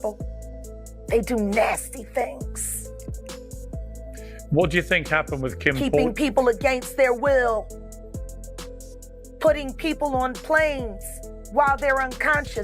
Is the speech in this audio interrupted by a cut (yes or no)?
yes